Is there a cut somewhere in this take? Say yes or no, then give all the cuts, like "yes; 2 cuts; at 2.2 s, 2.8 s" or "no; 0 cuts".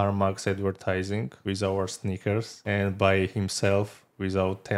yes; 2 cuts; at 1.3 s, 2.6 s